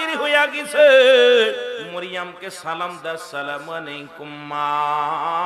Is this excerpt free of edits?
no; 1 cut; at 1.9 s

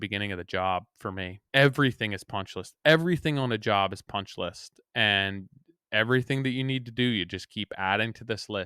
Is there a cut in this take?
yes; 1 cut; at 1.4 s

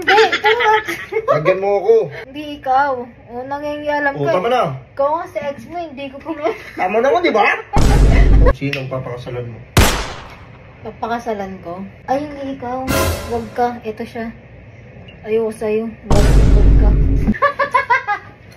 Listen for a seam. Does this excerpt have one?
yes; 4 cuts; at 2.2 s, 8.5 s, 11.9 s, 17.3 s

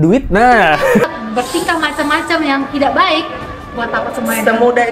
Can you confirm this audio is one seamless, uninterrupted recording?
no; 1 cut; at 1.0 s

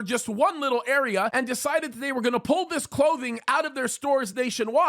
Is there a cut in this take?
yes; 1 cut; at 1.3 s

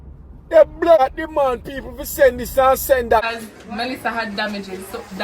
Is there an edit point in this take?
yes; 2 cuts; at 1.0 s, 3.2 s

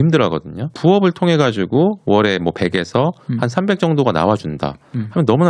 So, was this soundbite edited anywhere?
no; 0 cuts

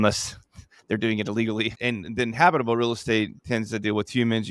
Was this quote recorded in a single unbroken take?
no; 1 cut; at 1.7 s

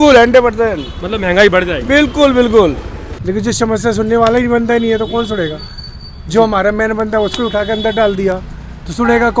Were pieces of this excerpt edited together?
yes; 1 cut; at 3.1 s

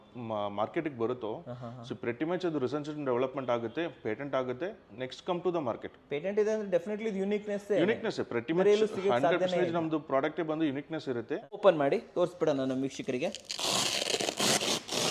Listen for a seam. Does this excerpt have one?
yes; 1 cut; at 11.6 s

